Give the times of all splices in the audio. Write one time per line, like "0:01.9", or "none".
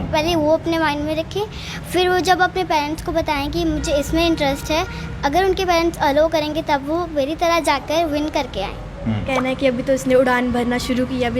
0:09.3